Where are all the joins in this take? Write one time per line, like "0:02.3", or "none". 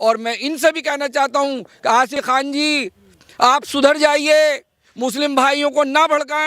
0:02.1